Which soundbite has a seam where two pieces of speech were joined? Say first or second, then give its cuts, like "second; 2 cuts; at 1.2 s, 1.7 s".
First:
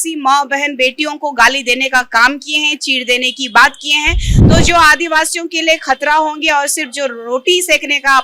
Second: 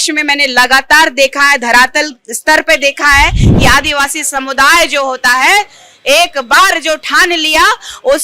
second; 1 cut; at 3.5 s